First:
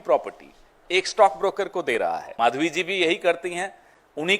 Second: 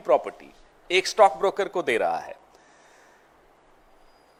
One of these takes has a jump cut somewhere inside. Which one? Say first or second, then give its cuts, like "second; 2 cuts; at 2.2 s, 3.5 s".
first; 1 cut; at 2.0 s